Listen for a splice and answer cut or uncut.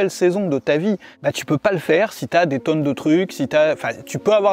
cut